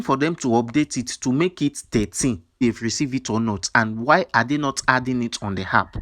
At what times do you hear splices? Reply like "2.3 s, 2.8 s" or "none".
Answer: 2.5 s